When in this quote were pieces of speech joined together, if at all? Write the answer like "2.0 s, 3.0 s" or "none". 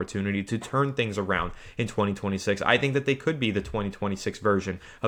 none

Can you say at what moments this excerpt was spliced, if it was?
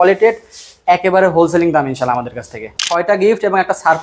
2.6 s

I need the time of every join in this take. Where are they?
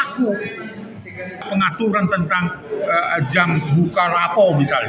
1.4 s

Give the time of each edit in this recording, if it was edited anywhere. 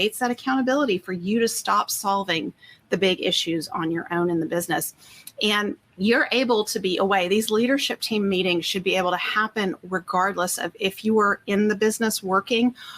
5.9 s

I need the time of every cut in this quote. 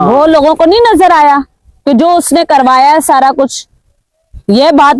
none

